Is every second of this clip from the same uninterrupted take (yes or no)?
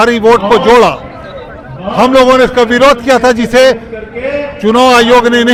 yes